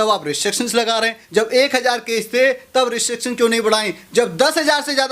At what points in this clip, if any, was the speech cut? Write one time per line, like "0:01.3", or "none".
0:01.2